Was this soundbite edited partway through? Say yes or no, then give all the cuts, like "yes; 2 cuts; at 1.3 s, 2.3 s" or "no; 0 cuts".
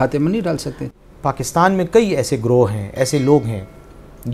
yes; 1 cut; at 0.9 s